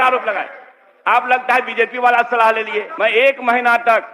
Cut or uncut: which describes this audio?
cut